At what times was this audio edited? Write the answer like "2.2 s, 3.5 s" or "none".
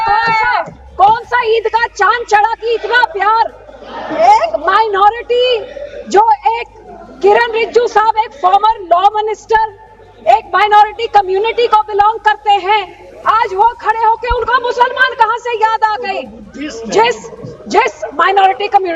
none